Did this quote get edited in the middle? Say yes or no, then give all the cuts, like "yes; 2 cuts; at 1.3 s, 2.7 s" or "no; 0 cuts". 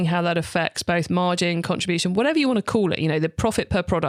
no; 0 cuts